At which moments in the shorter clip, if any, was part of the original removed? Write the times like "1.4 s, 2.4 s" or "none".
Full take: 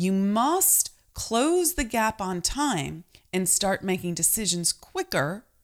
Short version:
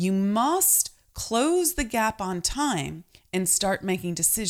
none